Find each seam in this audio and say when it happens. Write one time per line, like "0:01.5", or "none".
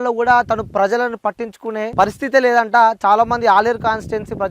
0:01.9